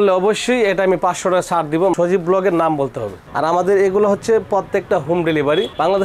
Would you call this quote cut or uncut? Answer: cut